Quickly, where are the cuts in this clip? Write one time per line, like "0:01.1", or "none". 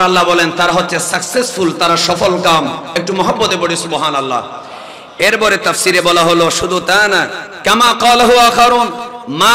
0:07.5